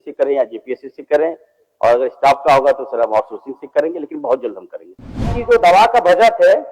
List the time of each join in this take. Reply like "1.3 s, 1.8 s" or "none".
5.4 s